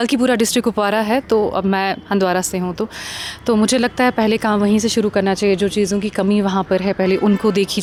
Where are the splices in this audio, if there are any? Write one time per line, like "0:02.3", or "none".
none